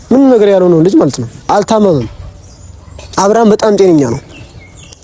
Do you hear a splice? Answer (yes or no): yes